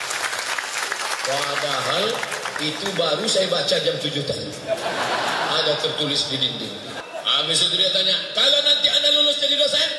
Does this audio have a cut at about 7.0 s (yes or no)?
yes